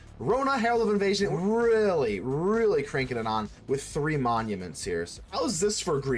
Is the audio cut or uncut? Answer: cut